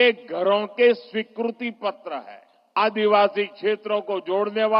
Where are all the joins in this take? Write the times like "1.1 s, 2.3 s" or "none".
2.8 s

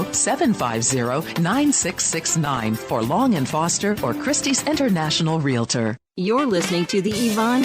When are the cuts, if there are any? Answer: 6.1 s

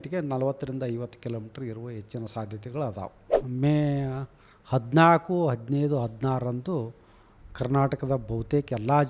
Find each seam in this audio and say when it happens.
3.4 s

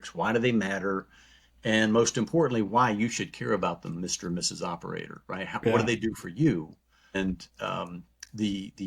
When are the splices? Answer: 7.1 s

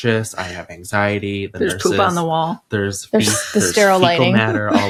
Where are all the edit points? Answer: none

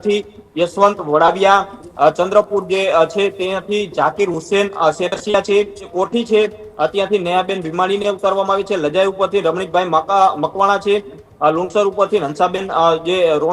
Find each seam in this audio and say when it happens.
5.8 s

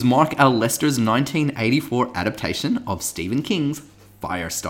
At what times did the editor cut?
none

